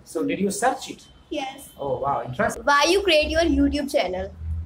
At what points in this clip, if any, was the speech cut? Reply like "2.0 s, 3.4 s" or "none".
2.6 s